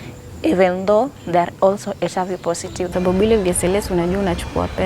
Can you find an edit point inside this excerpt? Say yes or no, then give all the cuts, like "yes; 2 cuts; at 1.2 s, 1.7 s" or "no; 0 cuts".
yes; 1 cut; at 2.9 s